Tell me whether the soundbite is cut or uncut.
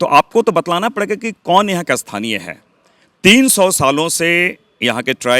uncut